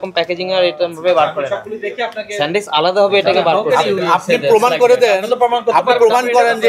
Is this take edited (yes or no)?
no